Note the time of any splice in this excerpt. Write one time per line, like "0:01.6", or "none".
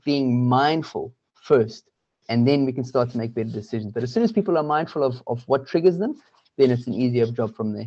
none